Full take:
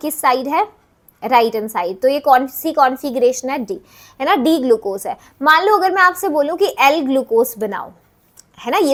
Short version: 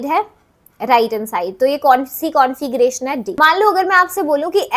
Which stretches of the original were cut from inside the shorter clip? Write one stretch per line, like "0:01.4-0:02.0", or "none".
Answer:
0:03.7-0:05.3